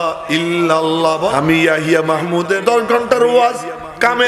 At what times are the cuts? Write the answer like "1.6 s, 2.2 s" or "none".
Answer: 1.3 s, 2.6 s